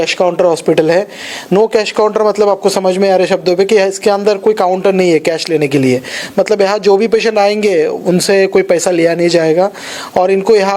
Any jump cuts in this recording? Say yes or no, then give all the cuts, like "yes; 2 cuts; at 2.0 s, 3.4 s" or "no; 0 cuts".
no; 0 cuts